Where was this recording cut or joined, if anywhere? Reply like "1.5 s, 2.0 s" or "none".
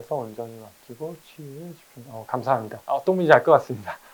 none